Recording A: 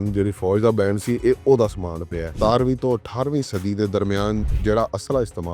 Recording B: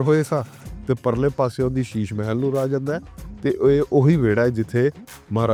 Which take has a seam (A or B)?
A